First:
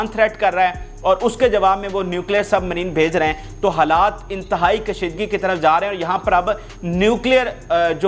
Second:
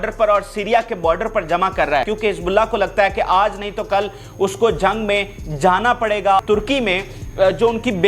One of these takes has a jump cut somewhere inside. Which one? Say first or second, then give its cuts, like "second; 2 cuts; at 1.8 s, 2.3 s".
second; 2 cuts; at 2.1 s, 6.4 s